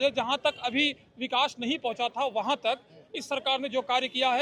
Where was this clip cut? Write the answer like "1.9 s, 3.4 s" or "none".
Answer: none